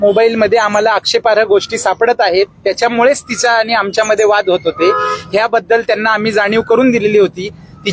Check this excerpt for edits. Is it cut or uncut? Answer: uncut